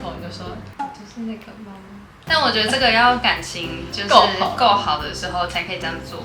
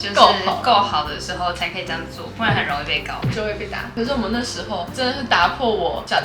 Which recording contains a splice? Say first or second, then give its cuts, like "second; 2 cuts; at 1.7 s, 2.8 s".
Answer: second; 1 cut; at 3.8 s